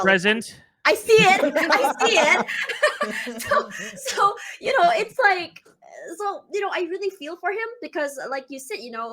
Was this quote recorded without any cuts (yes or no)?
yes